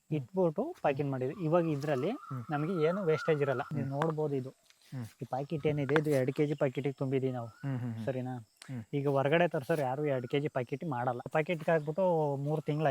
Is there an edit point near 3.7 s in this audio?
yes; 2 cuts; at 3.7 s, 11.3 s

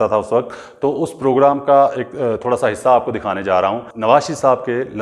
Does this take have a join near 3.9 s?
yes; 1 cut; at 3.9 s

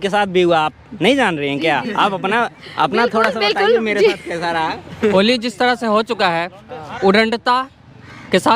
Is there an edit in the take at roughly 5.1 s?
yes; 1 cut; at 5.1 s

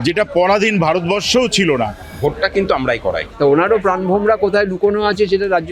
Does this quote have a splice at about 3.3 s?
yes; 2 cuts; at 2.0 s, 3.3 s

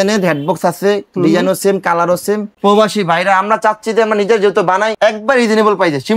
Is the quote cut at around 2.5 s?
yes; 1 cut; at 2.5 s

